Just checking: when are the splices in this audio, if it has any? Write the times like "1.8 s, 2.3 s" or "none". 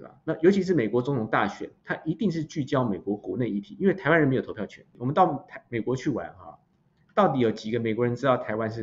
4.9 s